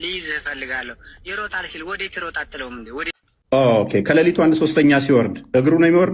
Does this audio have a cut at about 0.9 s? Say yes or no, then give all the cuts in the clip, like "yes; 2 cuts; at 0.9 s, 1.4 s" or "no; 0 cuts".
no; 1 cut; at 3.1 s